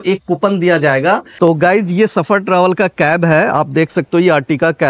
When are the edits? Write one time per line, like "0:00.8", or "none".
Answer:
0:01.3

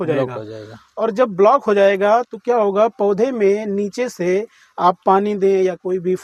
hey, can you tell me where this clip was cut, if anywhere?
none

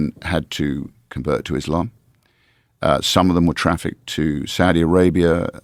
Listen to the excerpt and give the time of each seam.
none

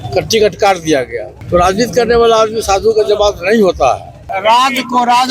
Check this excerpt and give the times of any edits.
0:01.3
0:04.3

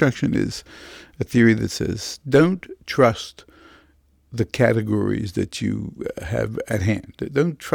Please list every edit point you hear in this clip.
0:06.8

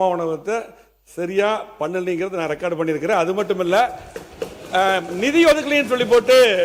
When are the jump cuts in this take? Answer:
none

